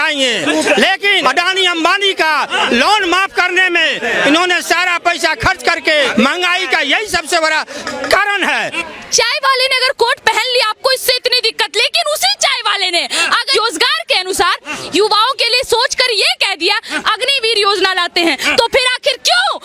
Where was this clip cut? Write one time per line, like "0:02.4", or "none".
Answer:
0:01.2
0:06.1
0:08.8
0:13.5